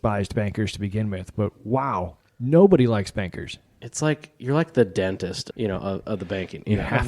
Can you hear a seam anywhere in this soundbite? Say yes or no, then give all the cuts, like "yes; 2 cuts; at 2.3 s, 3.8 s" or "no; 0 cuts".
yes; 2 cuts; at 2.2 s, 5.5 s